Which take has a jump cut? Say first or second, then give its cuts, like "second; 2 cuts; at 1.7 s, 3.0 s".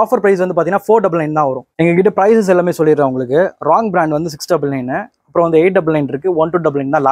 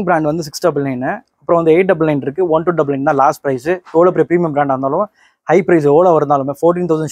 first; 1 cut; at 1.7 s